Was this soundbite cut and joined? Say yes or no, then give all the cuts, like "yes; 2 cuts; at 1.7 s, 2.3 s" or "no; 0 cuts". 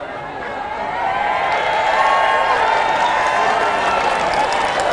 no; 0 cuts